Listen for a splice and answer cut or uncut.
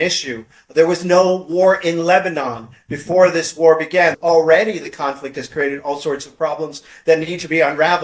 cut